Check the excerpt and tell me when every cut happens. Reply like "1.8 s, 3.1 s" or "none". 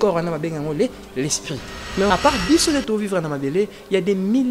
2.1 s